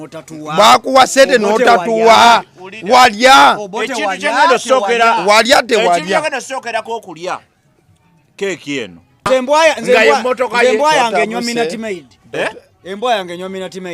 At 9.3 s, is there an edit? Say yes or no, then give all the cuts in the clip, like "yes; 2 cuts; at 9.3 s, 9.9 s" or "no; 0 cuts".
yes; 1 cut; at 9.3 s